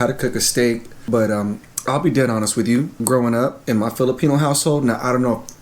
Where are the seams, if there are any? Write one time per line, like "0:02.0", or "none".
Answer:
0:00.9
0:03.0
0:03.6